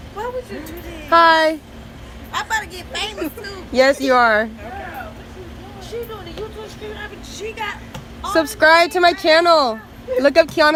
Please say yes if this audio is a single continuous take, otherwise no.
yes